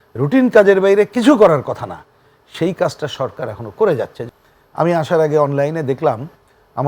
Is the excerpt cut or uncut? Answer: cut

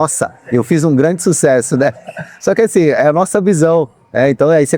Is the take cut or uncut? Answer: uncut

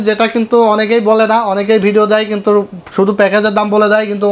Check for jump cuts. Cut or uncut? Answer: uncut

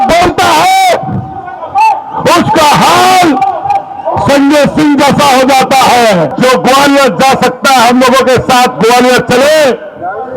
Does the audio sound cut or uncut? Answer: cut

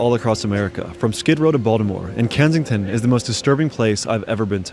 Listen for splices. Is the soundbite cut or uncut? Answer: uncut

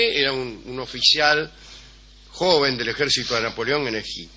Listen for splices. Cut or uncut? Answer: cut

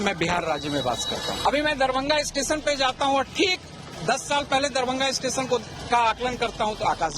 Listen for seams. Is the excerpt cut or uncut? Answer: cut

